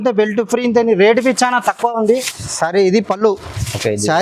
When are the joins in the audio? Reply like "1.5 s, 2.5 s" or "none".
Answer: 2.2 s